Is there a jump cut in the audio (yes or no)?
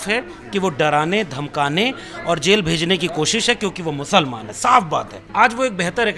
yes